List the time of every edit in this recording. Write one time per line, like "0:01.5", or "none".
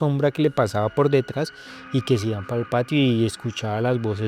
none